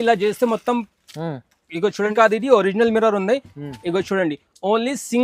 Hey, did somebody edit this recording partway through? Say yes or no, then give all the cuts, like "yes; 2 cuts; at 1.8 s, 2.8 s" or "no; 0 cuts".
yes; 1 cut; at 2.1 s